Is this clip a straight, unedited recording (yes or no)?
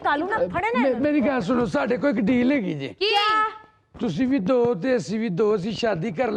yes